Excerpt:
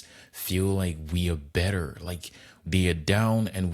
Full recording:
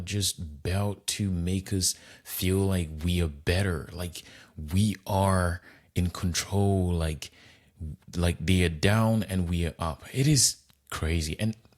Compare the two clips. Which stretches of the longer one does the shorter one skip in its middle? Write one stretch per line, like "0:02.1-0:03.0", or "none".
0:04.6-0:08.4